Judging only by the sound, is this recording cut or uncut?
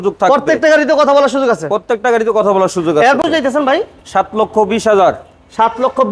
cut